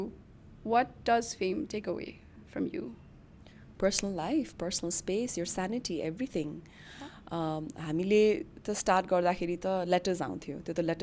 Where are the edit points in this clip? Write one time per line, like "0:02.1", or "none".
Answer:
none

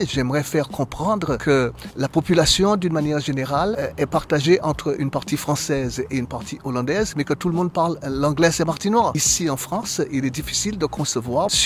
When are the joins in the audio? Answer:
none

